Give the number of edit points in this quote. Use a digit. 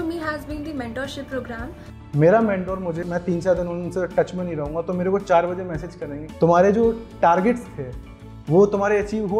1